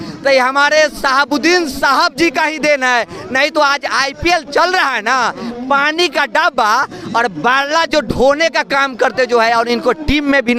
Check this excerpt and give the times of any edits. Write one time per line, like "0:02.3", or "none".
none